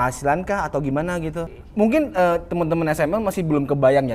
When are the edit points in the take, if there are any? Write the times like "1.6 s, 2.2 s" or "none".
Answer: 1.6 s